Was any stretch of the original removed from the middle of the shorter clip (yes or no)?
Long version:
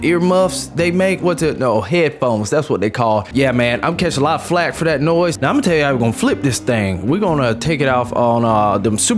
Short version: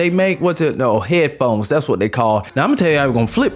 yes